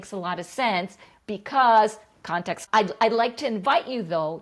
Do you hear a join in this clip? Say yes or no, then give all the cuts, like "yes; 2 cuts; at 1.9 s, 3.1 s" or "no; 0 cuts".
yes; 1 cut; at 2.6 s